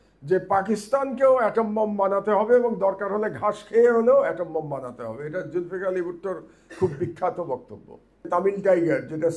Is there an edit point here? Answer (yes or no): yes